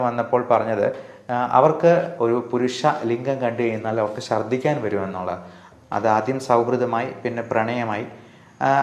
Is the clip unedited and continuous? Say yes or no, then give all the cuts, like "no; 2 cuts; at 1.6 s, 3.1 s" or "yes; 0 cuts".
no; 2 cuts; at 2.1 s, 5.6 s